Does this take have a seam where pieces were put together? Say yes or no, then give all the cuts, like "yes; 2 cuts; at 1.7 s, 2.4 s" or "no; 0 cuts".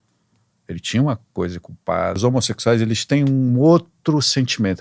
yes; 1 cut; at 2.2 s